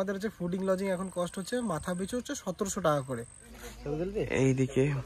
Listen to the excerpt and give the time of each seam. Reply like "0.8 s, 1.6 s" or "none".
3.4 s